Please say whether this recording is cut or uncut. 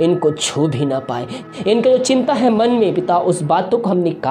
cut